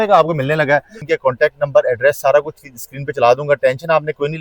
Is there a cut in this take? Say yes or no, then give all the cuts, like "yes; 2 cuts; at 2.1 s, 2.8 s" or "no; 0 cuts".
yes; 1 cut; at 1.0 s